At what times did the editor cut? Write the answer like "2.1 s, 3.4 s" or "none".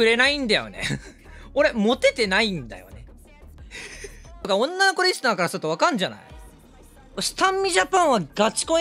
4.4 s